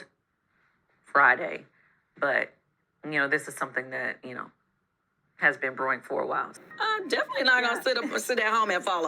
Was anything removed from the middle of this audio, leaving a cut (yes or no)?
yes